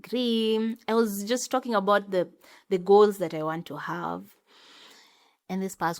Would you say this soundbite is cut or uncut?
uncut